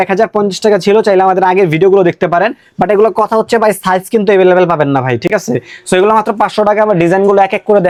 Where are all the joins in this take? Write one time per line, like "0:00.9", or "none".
none